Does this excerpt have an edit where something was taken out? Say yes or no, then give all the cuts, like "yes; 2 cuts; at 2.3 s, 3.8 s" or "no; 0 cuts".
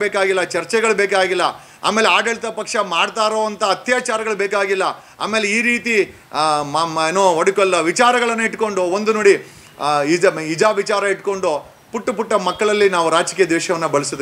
no; 0 cuts